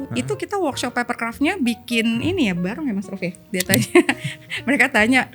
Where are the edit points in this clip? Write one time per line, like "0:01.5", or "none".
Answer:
0:03.5